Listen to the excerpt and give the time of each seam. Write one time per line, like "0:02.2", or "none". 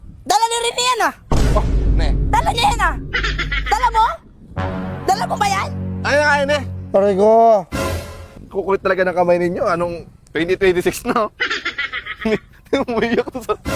0:08.2